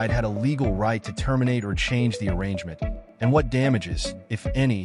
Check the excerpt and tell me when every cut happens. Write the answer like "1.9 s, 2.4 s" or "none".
1.4 s